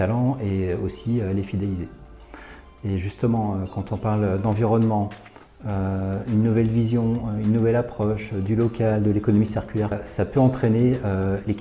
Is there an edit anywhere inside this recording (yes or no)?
yes